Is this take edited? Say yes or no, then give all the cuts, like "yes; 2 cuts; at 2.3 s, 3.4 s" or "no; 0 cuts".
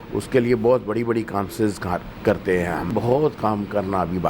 yes; 1 cut; at 2.9 s